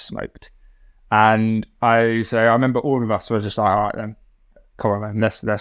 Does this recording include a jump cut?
no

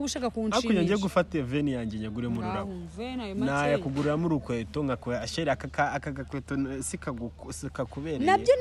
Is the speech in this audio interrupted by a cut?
no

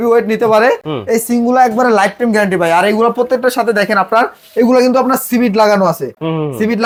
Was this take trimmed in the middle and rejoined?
no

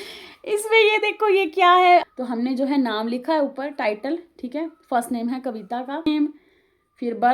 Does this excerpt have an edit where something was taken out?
yes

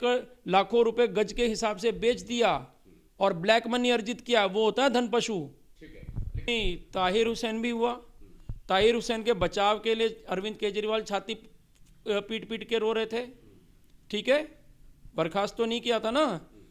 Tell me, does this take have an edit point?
yes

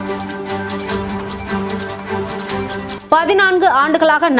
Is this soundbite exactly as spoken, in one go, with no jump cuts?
yes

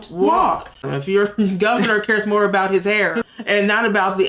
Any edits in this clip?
yes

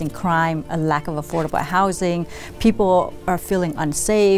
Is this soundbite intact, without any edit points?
yes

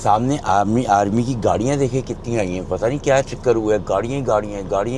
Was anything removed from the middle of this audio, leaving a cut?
no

